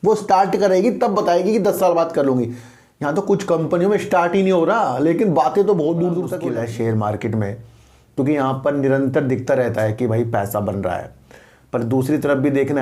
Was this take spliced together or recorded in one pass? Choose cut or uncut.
cut